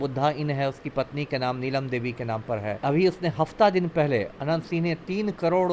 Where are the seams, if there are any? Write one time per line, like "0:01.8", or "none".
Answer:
0:02.8